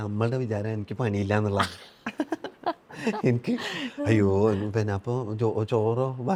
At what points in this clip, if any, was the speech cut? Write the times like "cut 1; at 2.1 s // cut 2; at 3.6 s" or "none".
none